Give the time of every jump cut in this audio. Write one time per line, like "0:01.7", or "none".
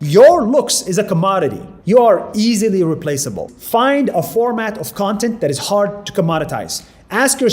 0:01.7
0:03.5